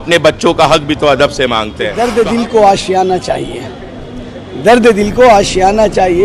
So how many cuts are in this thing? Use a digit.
1